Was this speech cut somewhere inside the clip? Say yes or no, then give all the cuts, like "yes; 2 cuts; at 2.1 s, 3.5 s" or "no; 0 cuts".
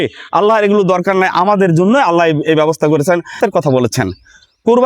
yes; 1 cut; at 3.4 s